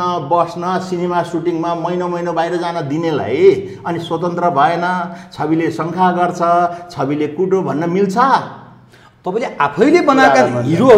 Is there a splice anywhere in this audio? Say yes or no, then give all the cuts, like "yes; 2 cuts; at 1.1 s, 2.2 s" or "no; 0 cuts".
no; 0 cuts